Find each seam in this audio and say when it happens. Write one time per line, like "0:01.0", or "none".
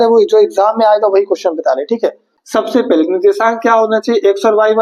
0:02.2